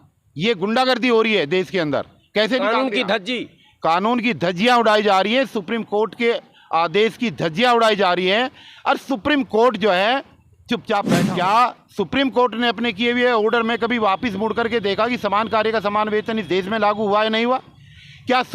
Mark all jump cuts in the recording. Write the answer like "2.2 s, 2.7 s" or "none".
11.2 s